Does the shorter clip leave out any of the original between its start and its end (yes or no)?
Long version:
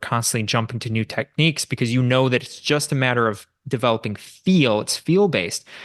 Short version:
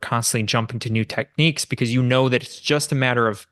no